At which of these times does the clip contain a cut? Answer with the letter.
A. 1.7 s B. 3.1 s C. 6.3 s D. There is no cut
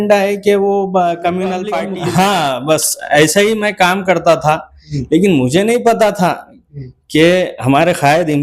A